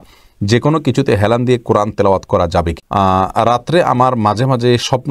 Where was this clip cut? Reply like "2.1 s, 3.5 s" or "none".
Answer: 2.8 s